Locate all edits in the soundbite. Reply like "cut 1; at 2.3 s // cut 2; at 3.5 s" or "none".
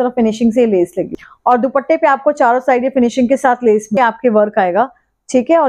cut 1; at 1.2 s // cut 2; at 4.0 s